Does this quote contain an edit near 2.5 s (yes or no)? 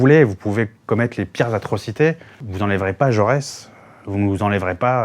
yes